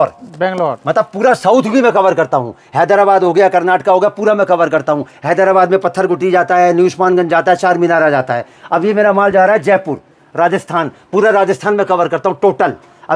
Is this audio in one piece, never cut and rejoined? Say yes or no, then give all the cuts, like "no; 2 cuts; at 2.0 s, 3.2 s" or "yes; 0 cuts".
yes; 0 cuts